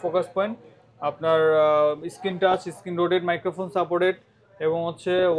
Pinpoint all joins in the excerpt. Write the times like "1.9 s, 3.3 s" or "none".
none